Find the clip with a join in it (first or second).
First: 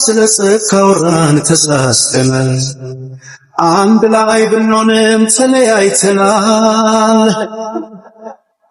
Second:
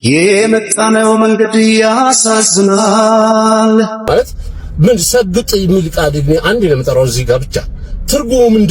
second